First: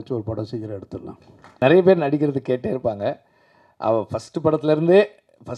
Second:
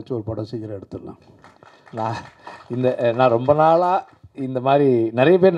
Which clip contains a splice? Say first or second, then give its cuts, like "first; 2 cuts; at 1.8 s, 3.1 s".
first; 1 cut; at 1.6 s